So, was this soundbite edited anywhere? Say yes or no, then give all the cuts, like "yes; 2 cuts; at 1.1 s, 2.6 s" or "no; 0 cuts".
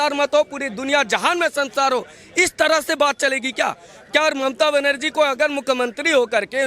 no; 0 cuts